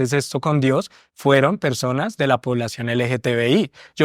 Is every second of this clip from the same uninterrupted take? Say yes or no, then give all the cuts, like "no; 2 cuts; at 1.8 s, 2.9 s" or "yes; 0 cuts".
yes; 0 cuts